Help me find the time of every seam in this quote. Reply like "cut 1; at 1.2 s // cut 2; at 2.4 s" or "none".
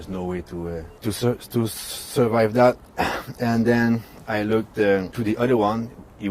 cut 1; at 0.9 s // cut 2; at 5.1 s